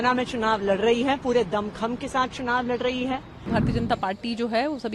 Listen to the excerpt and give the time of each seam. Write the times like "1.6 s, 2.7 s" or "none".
3.5 s